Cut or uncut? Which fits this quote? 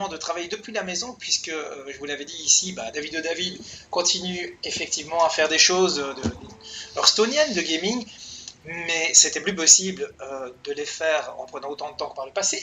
cut